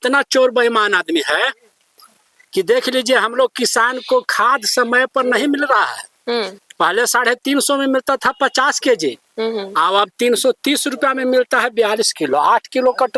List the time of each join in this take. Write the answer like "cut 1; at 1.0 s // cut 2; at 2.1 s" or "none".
none